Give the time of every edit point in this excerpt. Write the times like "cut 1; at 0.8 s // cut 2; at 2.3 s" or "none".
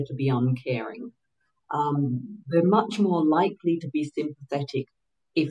none

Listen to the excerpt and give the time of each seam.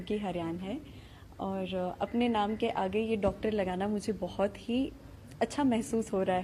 none

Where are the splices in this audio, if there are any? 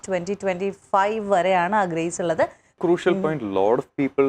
cut 1; at 2.7 s

